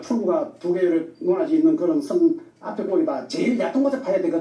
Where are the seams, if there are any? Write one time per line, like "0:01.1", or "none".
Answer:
none